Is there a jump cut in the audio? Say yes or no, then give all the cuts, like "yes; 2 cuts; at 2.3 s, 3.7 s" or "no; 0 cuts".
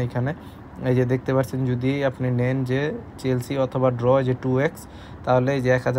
no; 0 cuts